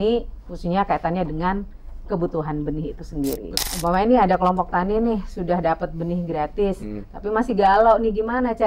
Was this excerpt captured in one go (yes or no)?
no